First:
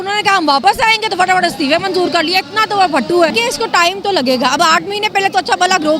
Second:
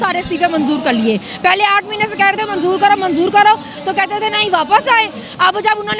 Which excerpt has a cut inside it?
first; 1 cut; at 3.3 s

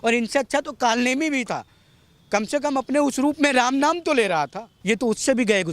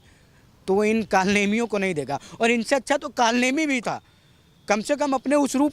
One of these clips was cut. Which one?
first; 1 cut; at 4.7 s

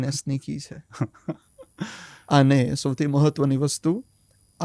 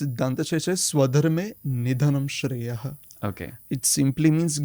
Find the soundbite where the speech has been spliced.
first; 1 cut; at 2.1 s

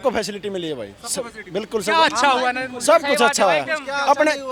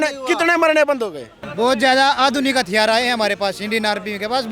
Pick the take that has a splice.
second; 1 cut; at 1.4 s

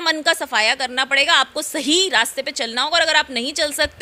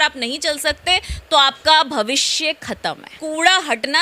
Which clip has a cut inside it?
second; 1 cut; at 3.1 s

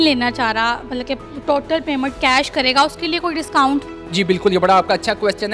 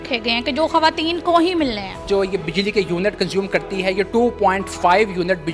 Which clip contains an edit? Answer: second; 1 cut; at 2.0 s

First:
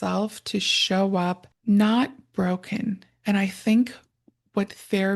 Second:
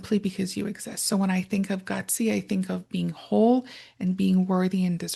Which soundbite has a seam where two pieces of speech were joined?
first; 1 cut; at 1.5 s

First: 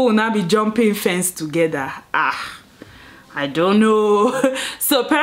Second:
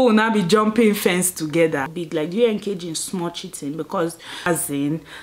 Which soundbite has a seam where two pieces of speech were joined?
second; 2 cuts; at 1.9 s, 4.5 s

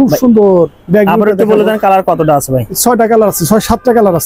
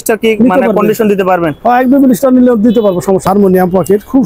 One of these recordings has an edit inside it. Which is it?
second; 1 cut; at 3.2 s

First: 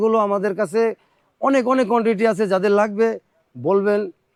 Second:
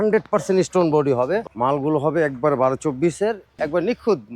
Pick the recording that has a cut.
second; 2 cuts; at 1.5 s, 3.5 s

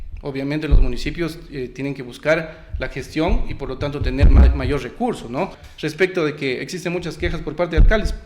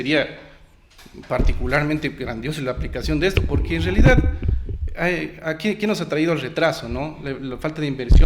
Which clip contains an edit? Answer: first; 1 cut; at 5.6 s

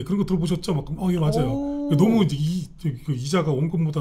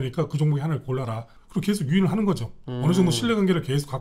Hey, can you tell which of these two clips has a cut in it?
second; 1 cut; at 1.4 s

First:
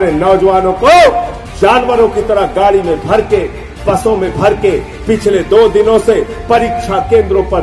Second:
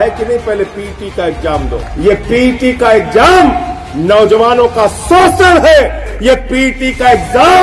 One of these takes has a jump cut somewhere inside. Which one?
second; 2 cuts; at 1.8 s, 6.1 s

